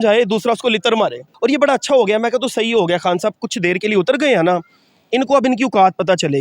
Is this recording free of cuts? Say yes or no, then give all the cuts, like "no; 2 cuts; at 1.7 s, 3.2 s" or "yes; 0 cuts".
no; 1 cut; at 1.3 s